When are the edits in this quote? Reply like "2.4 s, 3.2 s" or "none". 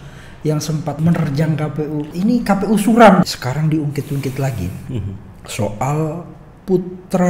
1.0 s, 2.1 s, 3.3 s